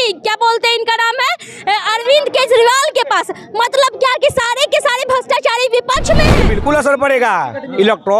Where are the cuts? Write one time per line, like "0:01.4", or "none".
0:06.5

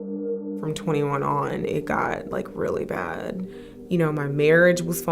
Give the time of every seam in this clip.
0:01.1

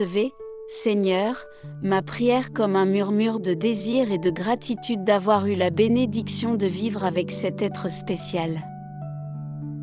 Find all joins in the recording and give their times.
0:08.6

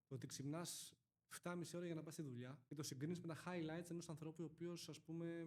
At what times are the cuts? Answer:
0:02.6

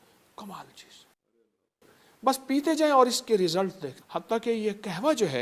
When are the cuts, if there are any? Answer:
none

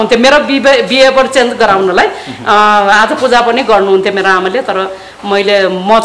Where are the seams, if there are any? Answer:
none

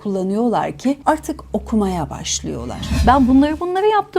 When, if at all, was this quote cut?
0:01.0
0:02.9

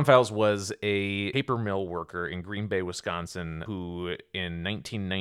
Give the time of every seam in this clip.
0:01.3
0:03.6

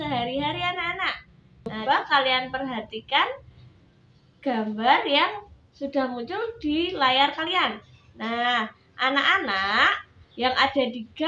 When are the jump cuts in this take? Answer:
0:01.8

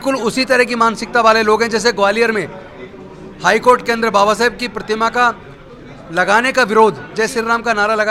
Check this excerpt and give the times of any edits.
none

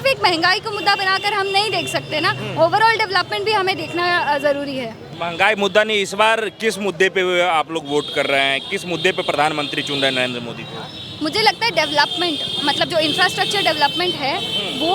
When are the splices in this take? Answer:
none

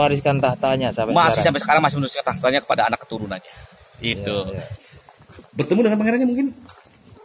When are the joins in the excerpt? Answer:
0:04.7

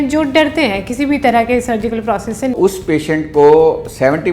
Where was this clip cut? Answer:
0:02.5

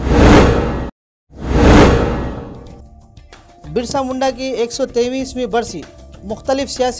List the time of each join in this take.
0:02.2
0:03.0

